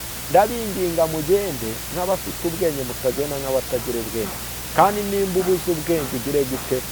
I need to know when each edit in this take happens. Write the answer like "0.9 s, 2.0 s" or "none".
none